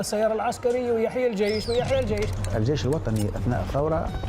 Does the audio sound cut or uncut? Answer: cut